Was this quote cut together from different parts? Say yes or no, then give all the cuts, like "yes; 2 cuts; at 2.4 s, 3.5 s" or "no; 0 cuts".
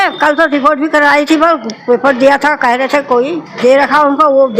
yes; 1 cut; at 3.5 s